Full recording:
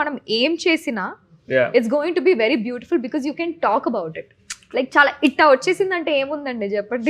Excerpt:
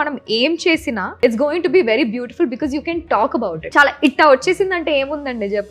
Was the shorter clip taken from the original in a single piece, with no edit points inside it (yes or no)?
no